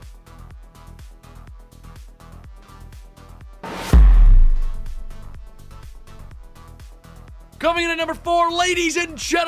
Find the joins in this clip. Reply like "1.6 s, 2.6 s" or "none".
none